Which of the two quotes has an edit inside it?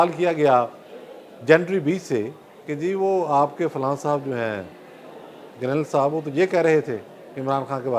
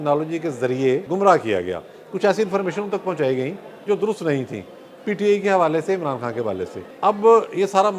second; 2 cuts; at 1.1 s, 6.8 s

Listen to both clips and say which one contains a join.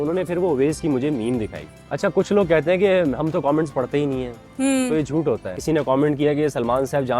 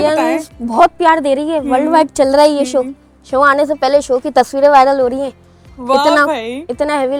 first; 2 cuts; at 1.8 s, 5.5 s

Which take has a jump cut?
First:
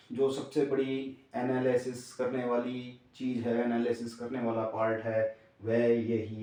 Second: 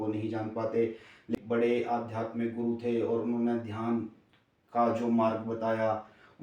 second; 1 cut; at 1.4 s

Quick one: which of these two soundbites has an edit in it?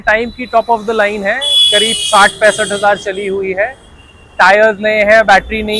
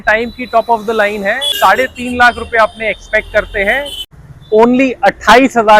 second; 2 cuts; at 1.5 s, 4.0 s

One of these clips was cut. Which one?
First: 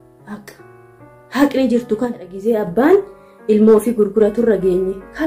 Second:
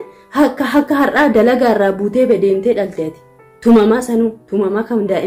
first; 1 cut; at 2.3 s

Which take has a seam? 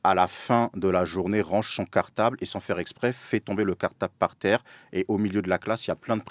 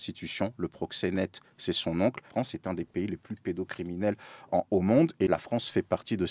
second; 2 cuts; at 2.2 s, 5.3 s

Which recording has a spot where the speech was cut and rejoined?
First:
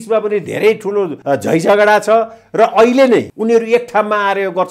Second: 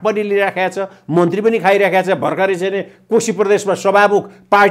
first; 2 cuts; at 1.2 s, 3.3 s

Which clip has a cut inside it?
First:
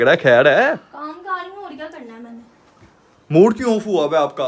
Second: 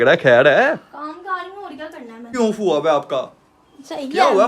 second; 1 cut; at 2.3 s

